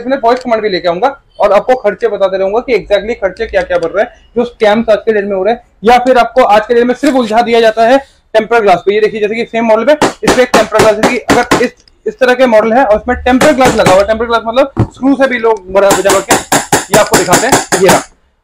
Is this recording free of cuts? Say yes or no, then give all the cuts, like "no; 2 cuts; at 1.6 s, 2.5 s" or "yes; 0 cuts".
yes; 0 cuts